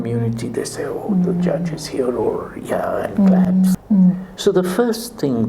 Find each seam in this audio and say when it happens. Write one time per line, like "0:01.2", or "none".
0:03.8